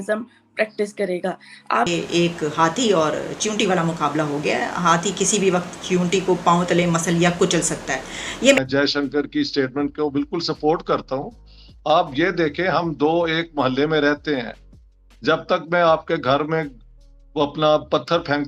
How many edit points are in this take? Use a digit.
2